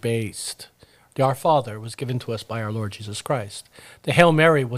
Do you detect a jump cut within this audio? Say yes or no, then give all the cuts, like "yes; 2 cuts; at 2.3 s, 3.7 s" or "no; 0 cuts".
no; 0 cuts